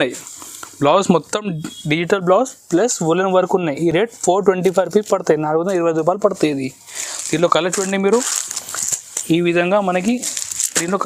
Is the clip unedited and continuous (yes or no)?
yes